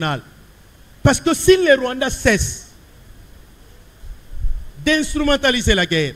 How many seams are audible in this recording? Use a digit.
0